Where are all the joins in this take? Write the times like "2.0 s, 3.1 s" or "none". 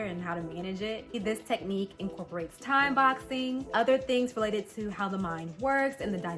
1.1 s